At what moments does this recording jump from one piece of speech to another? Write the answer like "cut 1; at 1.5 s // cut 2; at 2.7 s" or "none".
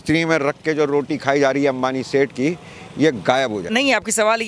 none